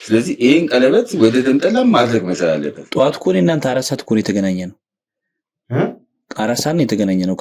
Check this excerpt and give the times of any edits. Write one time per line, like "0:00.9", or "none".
0:02.8